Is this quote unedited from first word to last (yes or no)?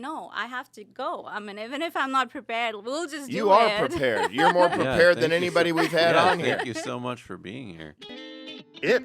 no